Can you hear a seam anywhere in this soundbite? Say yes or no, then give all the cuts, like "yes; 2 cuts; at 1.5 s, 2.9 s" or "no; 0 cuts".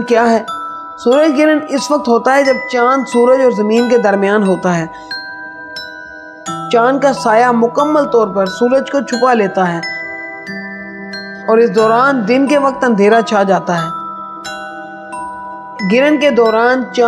no; 0 cuts